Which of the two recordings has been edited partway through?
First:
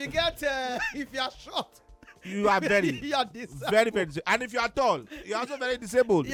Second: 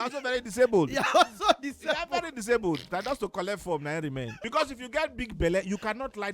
second; 1 cut; at 4.4 s

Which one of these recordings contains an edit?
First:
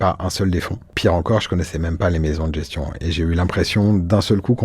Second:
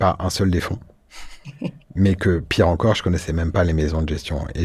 first; 1 cut; at 0.9 s

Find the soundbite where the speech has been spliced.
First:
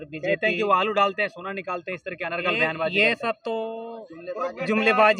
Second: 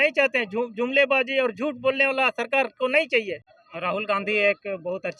second; 1 cut; at 3.3 s

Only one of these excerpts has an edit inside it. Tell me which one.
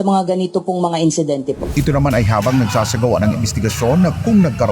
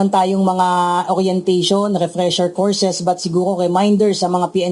first; 1 cut; at 1.6 s

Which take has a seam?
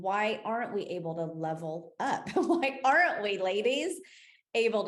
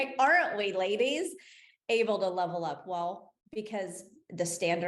second; 1 cut; at 3.3 s

